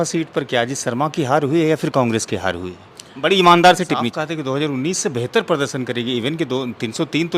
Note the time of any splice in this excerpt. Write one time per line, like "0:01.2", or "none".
0:04.1

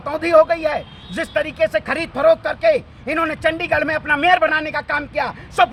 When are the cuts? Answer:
none

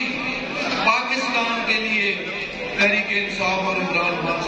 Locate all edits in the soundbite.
none

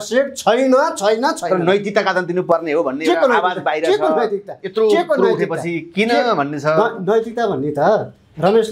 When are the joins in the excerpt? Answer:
none

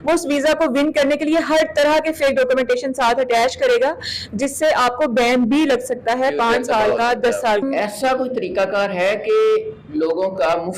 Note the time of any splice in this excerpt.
0:07.6

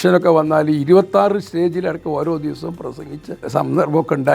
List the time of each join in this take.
0:03.5

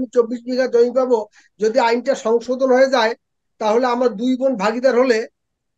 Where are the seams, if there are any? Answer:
none

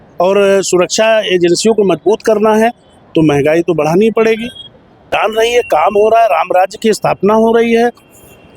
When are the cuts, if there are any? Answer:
0:05.1

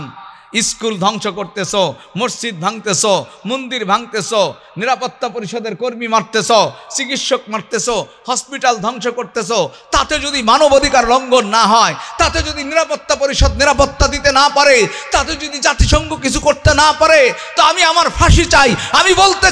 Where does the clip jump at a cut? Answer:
none

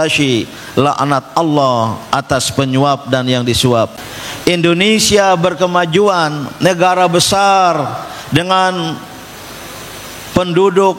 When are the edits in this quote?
0:04.0

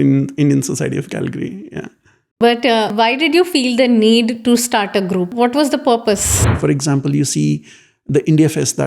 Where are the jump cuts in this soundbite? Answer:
0:02.9
0:05.3
0:06.4

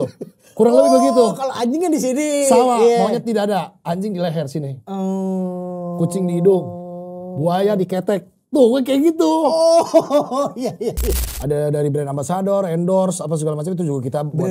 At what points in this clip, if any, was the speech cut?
0:11.1

